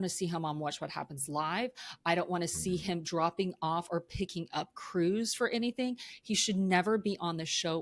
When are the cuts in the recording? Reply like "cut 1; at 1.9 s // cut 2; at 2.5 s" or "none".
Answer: none